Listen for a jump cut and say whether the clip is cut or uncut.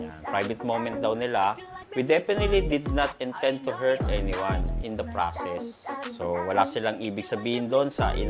uncut